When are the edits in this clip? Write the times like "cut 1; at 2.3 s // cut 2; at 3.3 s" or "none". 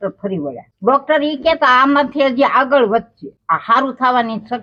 none